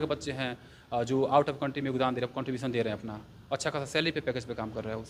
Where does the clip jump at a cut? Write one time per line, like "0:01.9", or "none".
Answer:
none